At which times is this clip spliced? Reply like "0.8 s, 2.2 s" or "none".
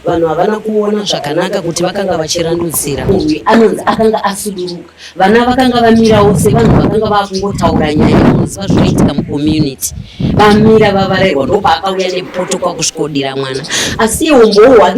3.1 s